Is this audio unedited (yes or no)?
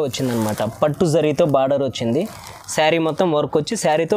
yes